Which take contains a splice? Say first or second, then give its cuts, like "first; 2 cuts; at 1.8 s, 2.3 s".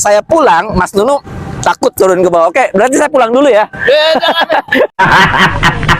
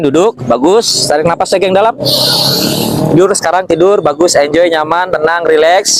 first; 1 cut; at 4.9 s